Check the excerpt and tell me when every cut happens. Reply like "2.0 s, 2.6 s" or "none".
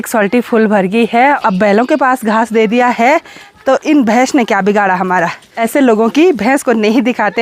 1.4 s, 5.5 s